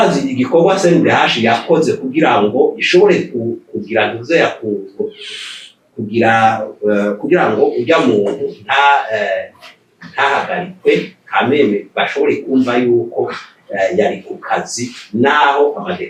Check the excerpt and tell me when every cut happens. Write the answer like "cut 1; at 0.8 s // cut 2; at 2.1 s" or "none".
none